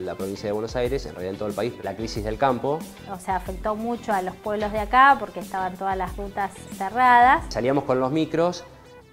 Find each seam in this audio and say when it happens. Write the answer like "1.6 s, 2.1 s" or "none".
1.8 s, 3.1 s, 6.6 s, 7.5 s